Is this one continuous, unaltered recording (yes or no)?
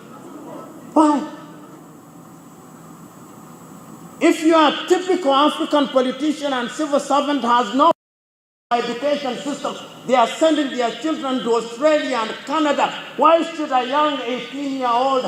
yes